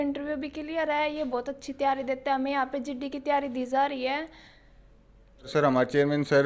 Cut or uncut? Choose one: cut